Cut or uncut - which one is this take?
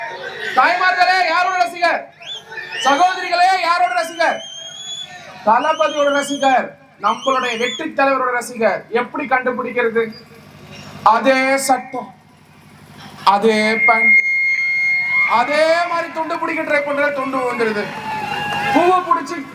uncut